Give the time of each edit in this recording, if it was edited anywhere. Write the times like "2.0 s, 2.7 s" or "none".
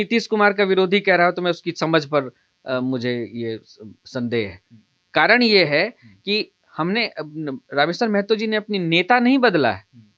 none